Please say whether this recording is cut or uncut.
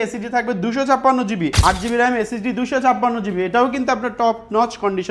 cut